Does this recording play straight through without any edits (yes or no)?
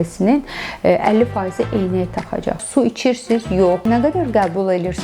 no